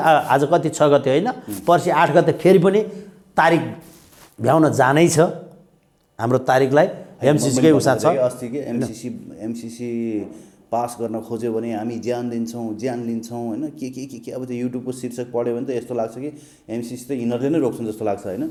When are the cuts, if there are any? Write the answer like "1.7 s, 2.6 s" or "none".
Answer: none